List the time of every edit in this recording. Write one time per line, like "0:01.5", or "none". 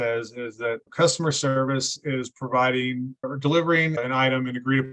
0:00.9
0:03.3
0:04.0

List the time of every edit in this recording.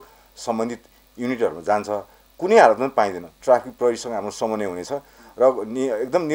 0:03.3

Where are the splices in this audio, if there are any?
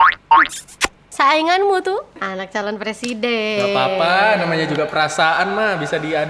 0:01.1
0:02.2

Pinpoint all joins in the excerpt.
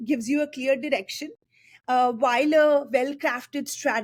none

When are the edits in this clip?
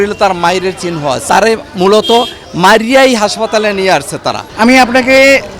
0:01.2
0:04.5

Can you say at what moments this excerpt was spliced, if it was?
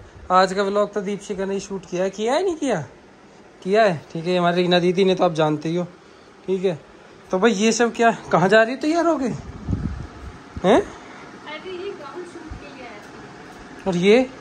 none

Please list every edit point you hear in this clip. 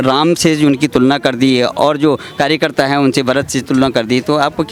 none

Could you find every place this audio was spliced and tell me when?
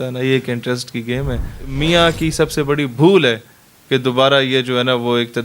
0:01.6

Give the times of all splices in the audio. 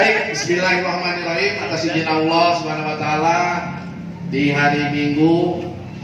none

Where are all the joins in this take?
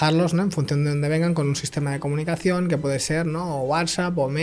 none

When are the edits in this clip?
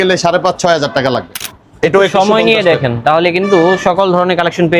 0:01.3

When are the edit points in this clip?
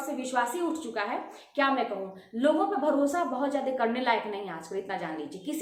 none

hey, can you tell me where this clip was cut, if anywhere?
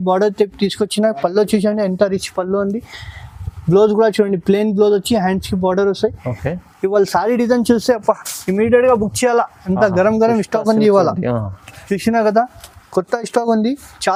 none

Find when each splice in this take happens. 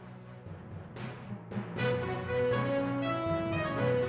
0:01.3

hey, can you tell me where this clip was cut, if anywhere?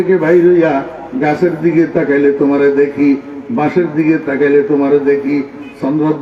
none

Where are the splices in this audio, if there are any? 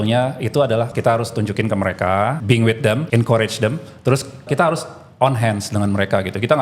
0:00.9
0:02.8
0:04.5

